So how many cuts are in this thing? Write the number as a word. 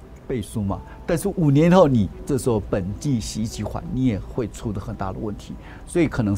one